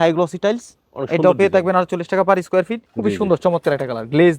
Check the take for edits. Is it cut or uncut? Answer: cut